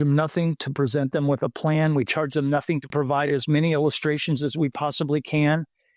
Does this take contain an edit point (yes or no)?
yes